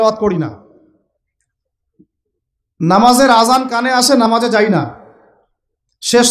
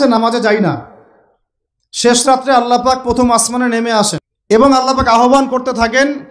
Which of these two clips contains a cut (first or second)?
second